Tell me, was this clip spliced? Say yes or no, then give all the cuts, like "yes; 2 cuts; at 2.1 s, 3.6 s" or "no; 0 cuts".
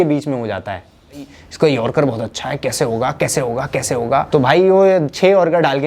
yes; 2 cuts; at 1.4 s, 4.3 s